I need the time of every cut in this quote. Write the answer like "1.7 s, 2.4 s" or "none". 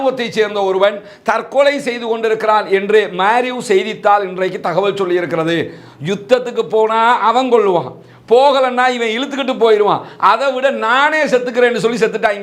none